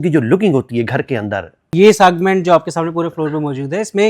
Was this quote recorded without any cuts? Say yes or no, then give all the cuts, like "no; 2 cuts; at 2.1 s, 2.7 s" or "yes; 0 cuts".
no; 1 cut; at 1.7 s